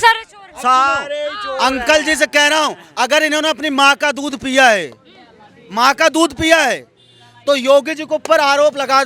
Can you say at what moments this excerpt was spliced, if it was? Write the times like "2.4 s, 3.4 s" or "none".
none